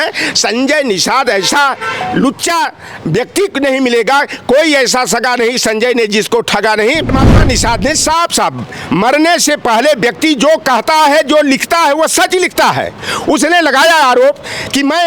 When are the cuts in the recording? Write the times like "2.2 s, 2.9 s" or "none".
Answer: 7.1 s